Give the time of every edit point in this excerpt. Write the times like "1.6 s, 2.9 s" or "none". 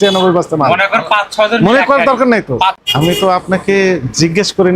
2.8 s